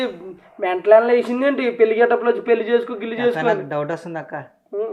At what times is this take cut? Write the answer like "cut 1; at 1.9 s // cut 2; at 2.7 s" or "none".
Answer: none